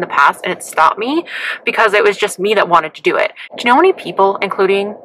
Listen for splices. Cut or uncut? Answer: uncut